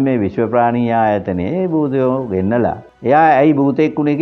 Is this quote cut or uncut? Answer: cut